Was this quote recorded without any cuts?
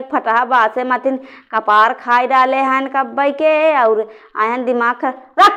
yes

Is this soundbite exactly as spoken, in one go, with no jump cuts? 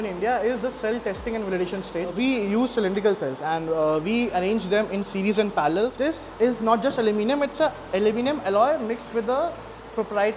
no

